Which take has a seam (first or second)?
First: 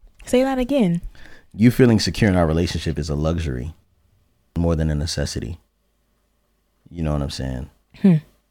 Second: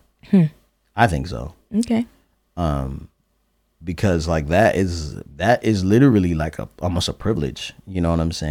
first